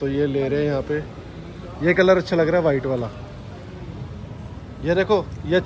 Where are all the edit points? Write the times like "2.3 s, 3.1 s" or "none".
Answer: none